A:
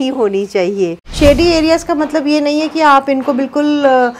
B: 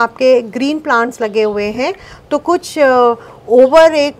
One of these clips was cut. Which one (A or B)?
A